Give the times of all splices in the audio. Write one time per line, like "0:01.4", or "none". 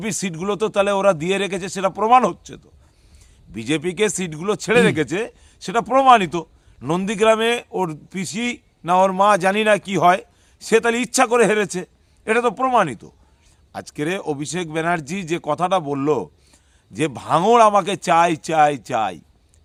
none